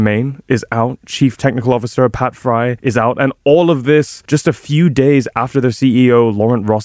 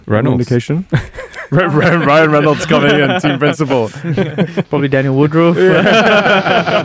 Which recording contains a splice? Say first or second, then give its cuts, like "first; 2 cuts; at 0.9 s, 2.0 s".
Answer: first; 2 cuts; at 2.8 s, 4.2 s